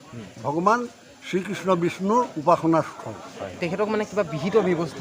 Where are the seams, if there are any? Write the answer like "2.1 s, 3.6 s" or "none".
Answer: 3.6 s